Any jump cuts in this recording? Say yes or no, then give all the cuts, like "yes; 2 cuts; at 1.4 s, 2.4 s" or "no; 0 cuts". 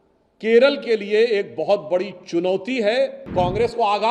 yes; 1 cut; at 3.2 s